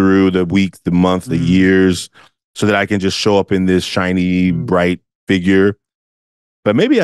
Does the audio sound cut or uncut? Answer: cut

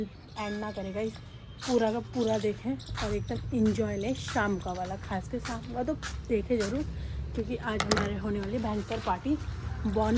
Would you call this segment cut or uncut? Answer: uncut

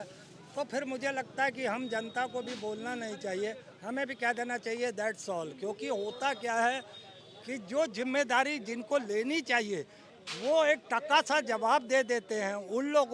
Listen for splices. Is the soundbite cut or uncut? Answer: uncut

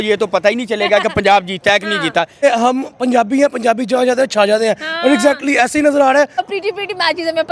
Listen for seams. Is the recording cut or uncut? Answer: cut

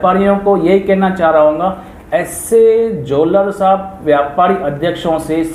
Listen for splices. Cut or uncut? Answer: uncut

